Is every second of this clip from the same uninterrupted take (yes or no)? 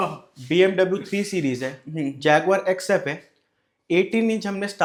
yes